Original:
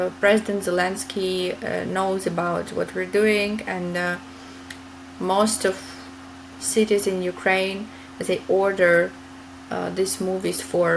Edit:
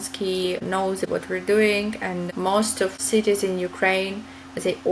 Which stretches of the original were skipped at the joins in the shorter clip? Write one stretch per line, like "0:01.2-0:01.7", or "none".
0:01.9-0:02.6
0:03.9-0:05.1
0:05.8-0:06.6